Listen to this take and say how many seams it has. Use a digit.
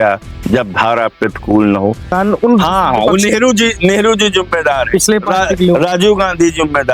1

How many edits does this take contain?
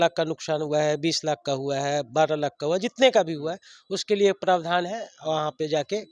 0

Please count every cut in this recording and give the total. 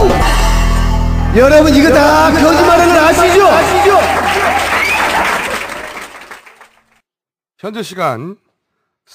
1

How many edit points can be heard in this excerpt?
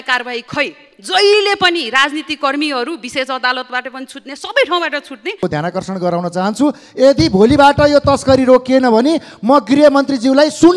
1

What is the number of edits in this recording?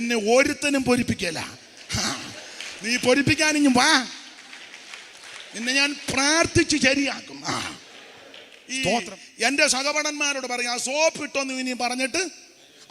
1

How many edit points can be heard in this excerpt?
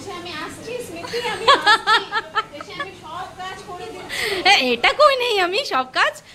0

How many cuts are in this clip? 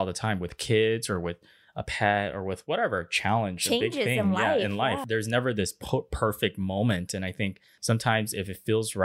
2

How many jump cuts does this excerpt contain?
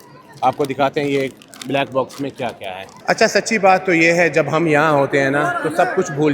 1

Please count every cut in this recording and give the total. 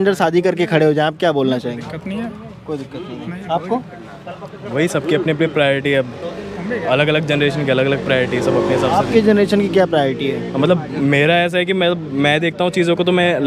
0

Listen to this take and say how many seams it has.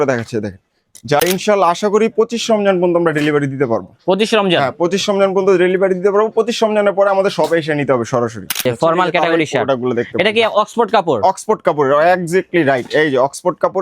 2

